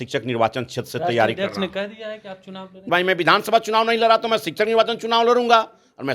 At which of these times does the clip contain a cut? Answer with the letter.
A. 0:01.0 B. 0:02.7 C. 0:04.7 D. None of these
B